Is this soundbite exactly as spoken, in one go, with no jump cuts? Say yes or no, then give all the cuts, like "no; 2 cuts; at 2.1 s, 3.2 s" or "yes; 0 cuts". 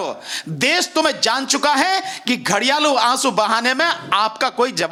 yes; 0 cuts